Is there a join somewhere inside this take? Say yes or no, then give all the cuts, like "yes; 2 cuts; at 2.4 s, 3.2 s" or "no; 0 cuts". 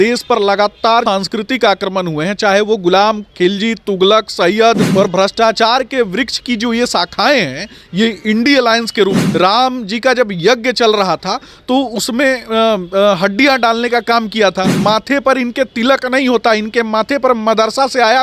yes; 4 cuts; at 1.0 s, 4.8 s, 9.2 s, 14.7 s